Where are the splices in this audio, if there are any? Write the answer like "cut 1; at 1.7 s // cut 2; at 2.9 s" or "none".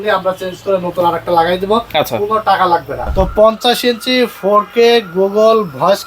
cut 1; at 3.0 s